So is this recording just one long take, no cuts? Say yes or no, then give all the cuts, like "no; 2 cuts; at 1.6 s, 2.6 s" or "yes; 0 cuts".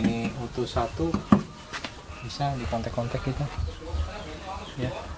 yes; 0 cuts